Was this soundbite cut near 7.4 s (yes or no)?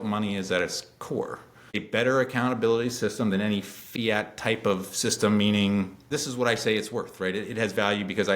no